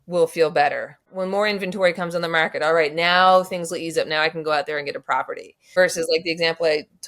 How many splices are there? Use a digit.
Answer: 2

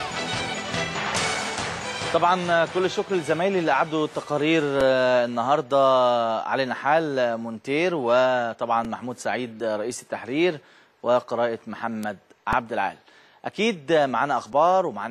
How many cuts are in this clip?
1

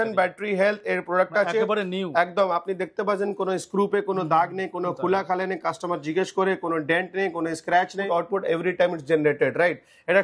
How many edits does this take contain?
1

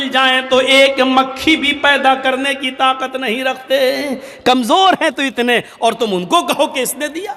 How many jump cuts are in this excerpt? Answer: 0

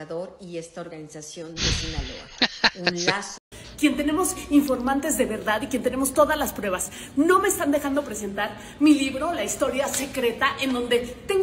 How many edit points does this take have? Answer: 1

